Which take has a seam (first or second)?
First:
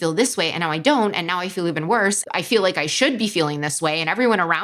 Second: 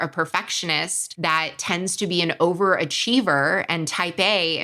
second